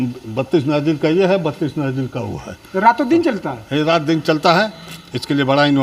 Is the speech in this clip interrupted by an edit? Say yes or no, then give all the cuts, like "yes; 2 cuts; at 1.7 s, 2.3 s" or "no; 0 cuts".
no; 0 cuts